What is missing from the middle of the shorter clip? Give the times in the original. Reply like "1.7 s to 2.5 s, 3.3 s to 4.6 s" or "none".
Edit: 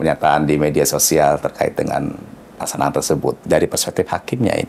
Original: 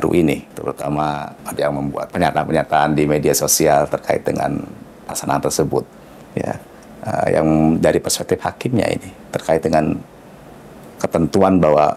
6.0 s to 7.8 s

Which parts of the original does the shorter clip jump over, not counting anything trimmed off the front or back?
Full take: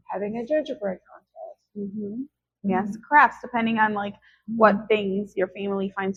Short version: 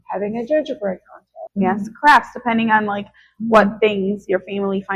1.3 s to 2.4 s

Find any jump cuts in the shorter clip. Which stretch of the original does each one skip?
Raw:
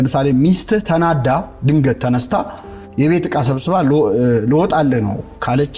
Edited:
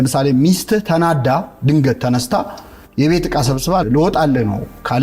3.8 s to 4.4 s

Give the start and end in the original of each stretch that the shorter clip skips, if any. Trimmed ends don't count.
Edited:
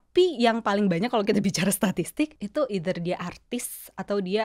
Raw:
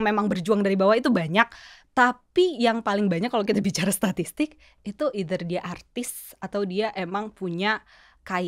4.6 s to 4.8 s

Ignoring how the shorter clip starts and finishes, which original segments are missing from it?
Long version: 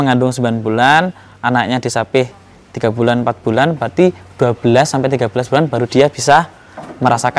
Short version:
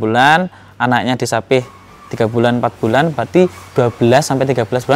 none

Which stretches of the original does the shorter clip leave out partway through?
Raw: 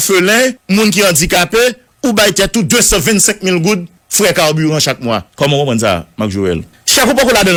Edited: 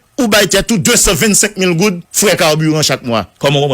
3.9 s to 4.0 s

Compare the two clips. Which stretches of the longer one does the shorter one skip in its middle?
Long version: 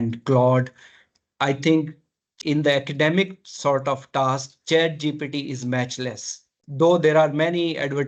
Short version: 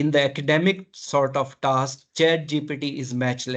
none

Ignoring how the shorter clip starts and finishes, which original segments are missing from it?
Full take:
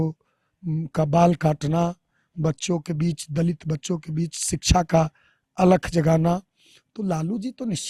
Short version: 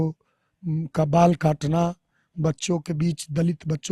none

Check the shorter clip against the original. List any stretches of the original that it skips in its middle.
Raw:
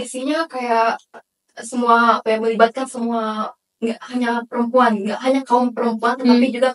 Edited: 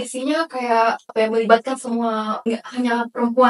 1.1 s to 2.2 s, 3.4 s to 3.7 s

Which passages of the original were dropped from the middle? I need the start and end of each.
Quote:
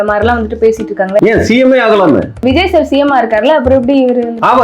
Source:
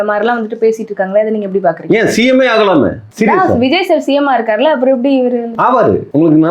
1.2 s to 1.9 s, 3.1 s to 3.6 s

